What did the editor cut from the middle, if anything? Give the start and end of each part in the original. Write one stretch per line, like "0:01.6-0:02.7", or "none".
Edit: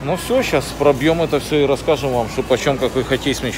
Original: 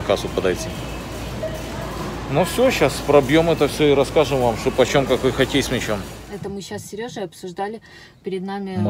none